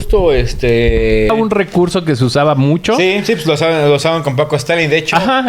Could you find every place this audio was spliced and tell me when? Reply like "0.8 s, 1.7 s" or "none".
1.3 s